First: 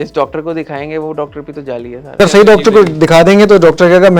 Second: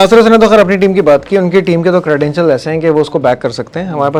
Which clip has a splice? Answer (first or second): first